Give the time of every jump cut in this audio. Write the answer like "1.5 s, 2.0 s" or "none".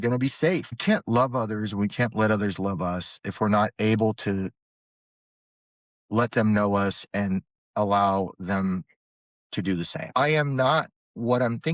0.8 s, 10.1 s